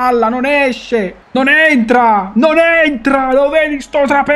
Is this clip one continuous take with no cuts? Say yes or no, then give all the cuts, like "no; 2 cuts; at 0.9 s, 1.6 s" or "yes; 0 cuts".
no; 1 cut; at 1.2 s